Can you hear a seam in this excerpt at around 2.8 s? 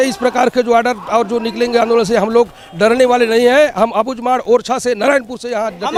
no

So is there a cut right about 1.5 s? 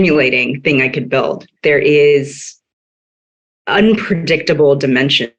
yes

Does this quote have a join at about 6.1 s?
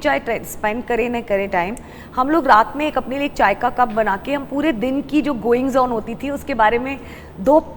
no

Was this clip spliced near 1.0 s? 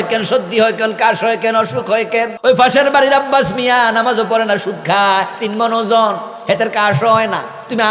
no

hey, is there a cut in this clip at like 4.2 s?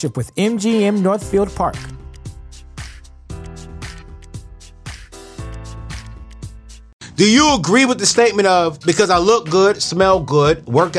no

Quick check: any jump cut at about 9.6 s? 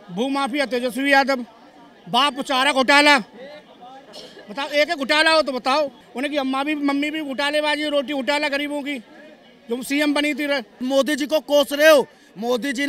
no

